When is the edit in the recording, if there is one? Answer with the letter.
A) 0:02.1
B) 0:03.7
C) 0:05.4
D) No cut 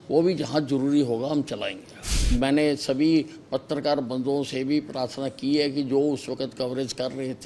A